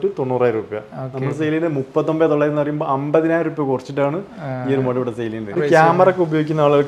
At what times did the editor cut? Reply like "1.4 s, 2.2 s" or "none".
5.6 s